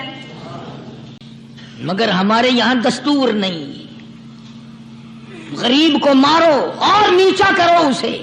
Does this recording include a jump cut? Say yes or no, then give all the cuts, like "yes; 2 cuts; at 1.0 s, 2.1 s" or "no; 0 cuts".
yes; 1 cut; at 1.2 s